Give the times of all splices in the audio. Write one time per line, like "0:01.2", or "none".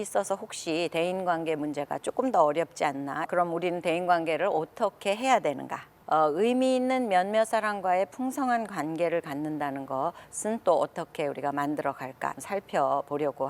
0:03.3
0:05.9
0:12.4

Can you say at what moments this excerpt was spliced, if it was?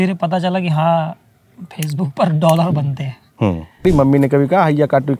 0:03.8

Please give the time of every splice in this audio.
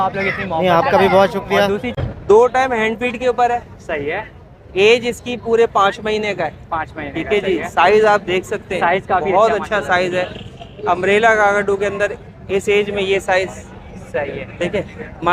0:02.0

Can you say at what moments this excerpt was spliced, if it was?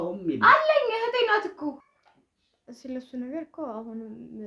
0:01.8

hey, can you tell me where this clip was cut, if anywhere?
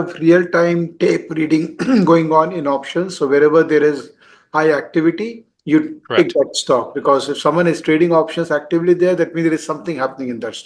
none

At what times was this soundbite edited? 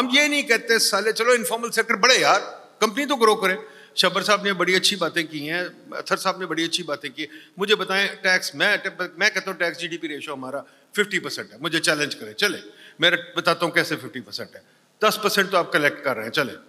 none

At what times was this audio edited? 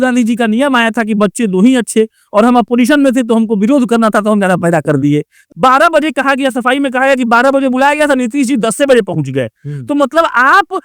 0:05.4

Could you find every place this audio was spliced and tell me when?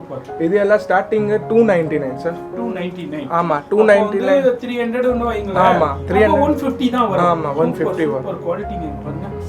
none

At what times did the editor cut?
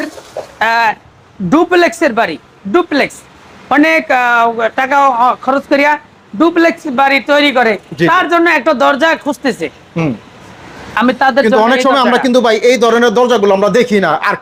none

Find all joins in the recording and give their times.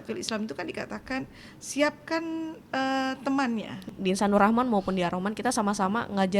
0:03.8

